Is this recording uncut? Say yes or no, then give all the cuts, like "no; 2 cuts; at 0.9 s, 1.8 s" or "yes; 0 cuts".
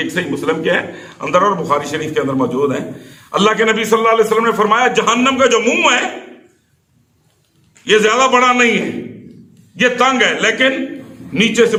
yes; 0 cuts